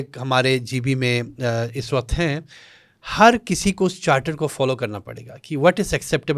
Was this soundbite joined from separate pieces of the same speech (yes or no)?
no